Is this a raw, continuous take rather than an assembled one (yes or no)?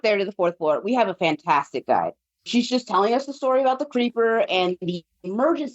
no